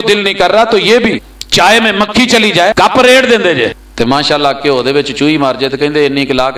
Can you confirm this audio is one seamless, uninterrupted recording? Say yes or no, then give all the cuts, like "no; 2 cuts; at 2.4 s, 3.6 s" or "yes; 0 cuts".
no; 3 cuts; at 1.3 s, 2.7 s, 3.8 s